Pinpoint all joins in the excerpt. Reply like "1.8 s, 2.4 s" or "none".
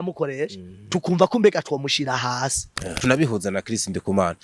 2.9 s